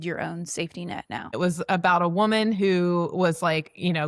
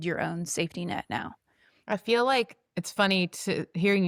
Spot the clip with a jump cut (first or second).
first